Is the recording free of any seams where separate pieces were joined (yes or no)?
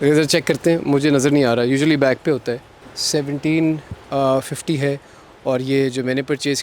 yes